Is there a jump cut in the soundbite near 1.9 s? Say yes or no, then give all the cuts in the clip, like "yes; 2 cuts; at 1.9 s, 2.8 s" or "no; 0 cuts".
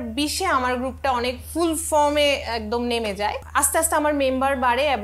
no; 1 cut; at 3.4 s